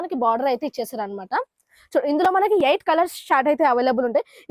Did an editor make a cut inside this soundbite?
no; 0 cuts

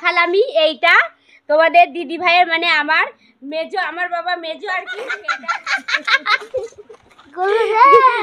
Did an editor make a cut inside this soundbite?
yes; 1 cut; at 5.2 s

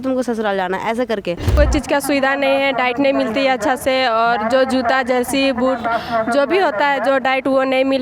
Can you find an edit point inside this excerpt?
yes; 1 cut; at 1.5 s

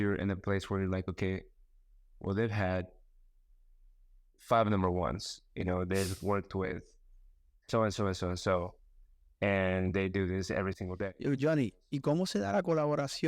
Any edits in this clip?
yes; 1 cut; at 11.0 s

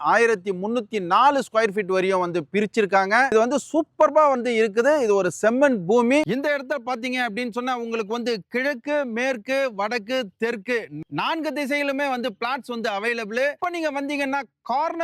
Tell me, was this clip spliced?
no; 0 cuts

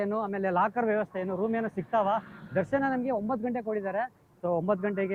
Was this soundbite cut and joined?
no; 0 cuts

